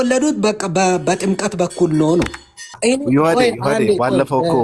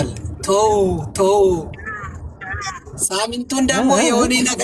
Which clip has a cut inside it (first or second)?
first